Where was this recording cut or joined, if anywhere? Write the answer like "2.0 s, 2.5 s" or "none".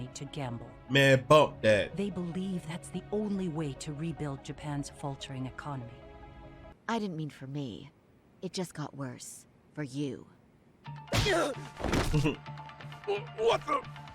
6.7 s